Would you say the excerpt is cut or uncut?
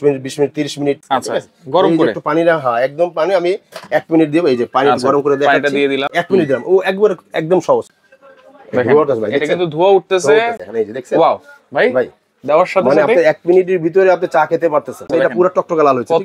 cut